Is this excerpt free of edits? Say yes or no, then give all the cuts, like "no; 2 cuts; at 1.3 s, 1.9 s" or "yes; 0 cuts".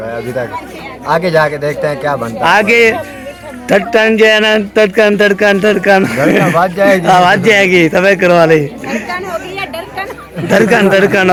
yes; 0 cuts